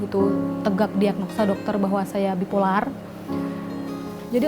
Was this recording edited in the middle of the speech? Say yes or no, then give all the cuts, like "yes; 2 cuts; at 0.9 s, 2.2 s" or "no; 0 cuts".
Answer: no; 0 cuts